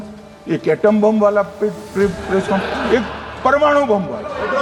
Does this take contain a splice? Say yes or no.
no